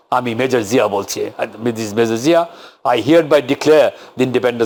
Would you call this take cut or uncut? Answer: uncut